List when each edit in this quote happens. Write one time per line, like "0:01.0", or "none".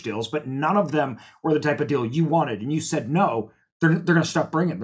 none

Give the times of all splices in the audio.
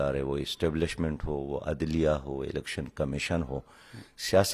none

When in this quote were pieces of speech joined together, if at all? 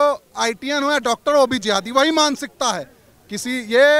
none

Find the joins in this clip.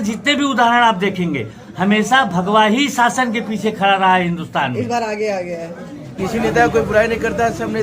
0:06.1

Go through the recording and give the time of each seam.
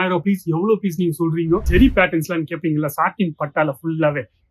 0:01.7

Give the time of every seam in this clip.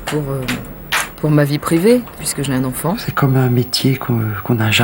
0:03.1

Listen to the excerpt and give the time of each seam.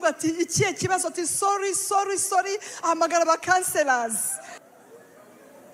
none

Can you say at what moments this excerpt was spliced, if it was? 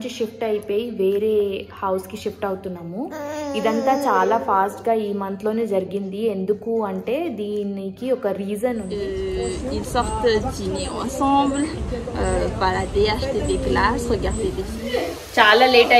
0:08.9
0:14.8

